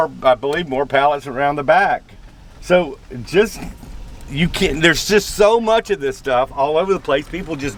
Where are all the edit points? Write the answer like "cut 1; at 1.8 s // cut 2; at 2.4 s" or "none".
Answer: none